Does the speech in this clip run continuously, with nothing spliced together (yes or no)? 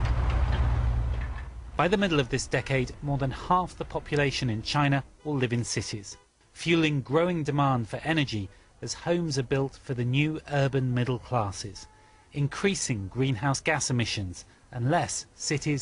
no